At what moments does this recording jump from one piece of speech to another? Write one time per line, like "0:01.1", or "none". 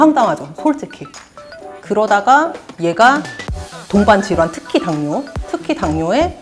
0:01.5